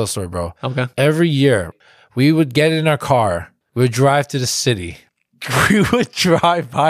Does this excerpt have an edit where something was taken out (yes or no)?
yes